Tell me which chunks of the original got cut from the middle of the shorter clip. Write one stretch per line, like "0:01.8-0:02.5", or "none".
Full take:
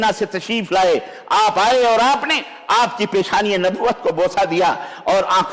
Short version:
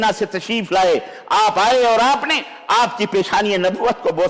none